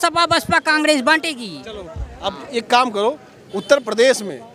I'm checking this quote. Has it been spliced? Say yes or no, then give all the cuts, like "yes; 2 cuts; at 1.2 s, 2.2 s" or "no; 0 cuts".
no; 0 cuts